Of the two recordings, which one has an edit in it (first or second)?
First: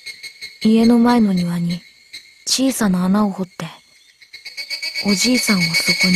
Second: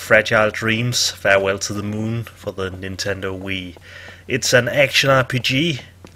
second